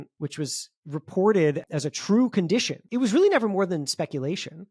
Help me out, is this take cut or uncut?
cut